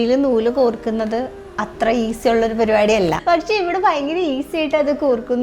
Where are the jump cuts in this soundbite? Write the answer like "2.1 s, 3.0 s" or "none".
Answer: 3.2 s